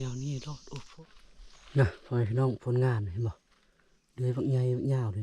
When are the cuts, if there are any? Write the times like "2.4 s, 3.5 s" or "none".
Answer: 1.0 s